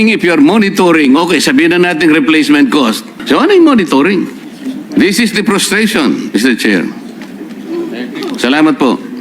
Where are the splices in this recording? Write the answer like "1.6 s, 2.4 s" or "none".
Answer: 3.1 s, 4.5 s